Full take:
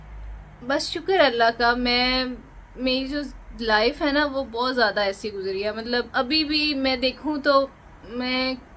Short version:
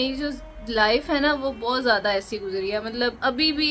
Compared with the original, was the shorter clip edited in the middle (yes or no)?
no